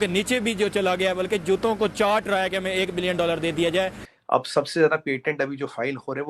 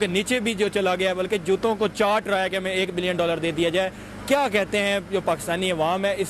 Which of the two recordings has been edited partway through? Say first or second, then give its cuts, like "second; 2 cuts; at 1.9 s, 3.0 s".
first; 1 cut; at 4.1 s